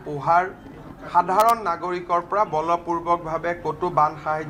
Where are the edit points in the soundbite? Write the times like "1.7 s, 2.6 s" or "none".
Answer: none